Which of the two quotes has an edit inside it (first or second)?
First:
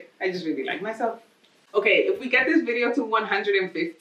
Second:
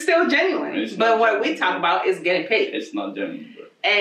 first